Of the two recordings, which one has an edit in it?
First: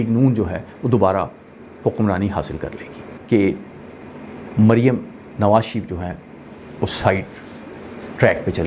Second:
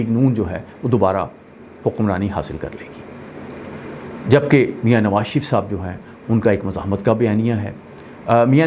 first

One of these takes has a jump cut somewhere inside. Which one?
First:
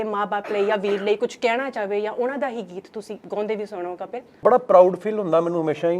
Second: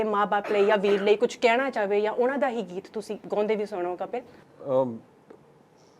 first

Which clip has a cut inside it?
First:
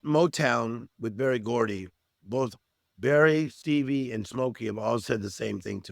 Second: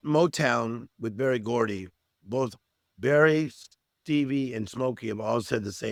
first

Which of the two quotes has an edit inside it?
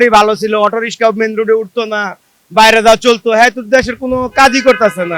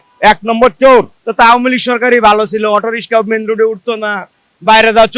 second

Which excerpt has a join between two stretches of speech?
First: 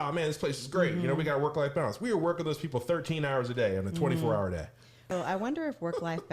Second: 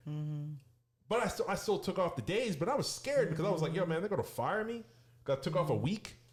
first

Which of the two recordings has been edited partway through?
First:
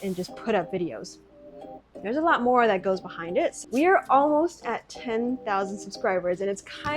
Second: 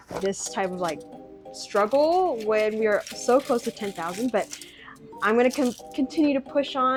first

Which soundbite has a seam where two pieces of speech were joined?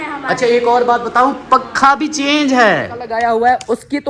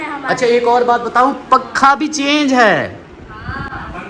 first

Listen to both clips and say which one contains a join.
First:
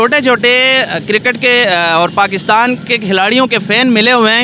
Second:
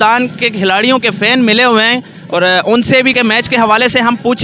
second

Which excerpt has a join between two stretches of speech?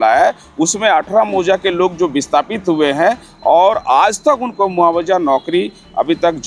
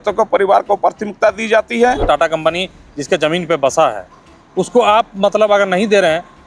second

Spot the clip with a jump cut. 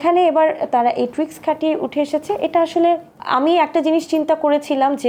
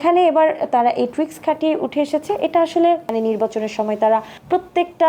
second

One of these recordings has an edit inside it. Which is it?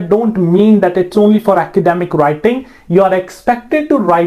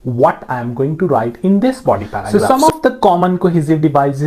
second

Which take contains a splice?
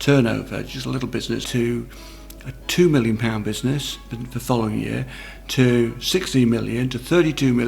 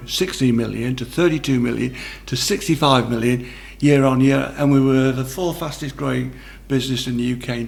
first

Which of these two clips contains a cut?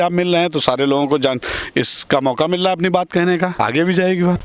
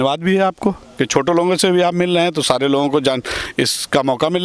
first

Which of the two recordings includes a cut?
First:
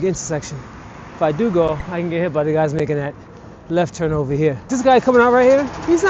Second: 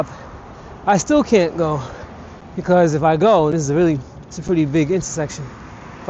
first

